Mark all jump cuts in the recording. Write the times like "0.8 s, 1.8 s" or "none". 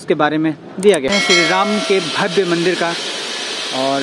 1.1 s